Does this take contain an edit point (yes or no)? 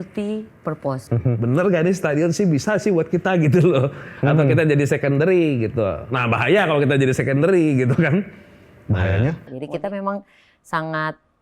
yes